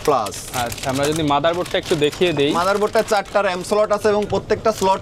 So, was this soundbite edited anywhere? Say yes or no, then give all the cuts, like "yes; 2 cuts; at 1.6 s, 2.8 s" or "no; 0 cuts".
no; 0 cuts